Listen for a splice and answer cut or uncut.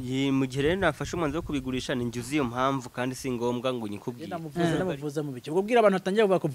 cut